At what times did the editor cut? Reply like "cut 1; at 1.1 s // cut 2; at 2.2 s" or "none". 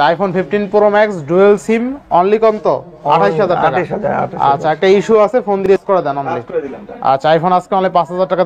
cut 1; at 5.7 s

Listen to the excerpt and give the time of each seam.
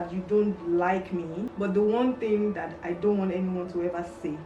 cut 1; at 1.5 s

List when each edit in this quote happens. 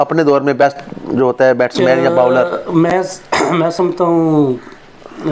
none

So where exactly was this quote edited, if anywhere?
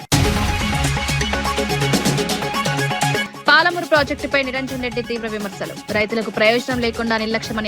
cut 1; at 1.4 s // cut 2; at 2.8 s

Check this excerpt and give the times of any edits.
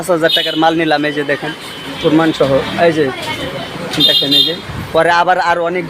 none

